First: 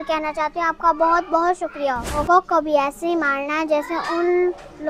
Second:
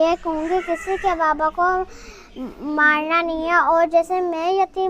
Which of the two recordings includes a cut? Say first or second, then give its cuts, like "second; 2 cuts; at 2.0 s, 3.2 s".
first; 1 cut; at 2.2 s